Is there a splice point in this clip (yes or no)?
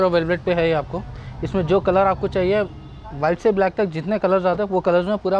no